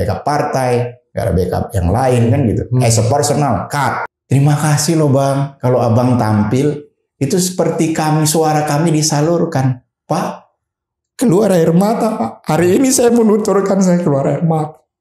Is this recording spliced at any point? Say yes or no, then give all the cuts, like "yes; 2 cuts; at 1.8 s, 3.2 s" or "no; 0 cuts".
yes; 1 cut; at 4.0 s